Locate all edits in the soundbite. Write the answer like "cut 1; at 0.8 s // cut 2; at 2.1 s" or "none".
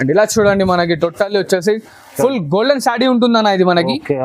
none